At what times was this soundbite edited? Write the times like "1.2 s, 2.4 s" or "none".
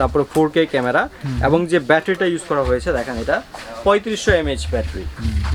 none